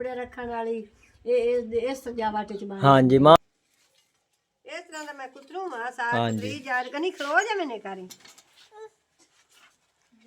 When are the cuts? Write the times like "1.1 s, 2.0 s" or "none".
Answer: 3.4 s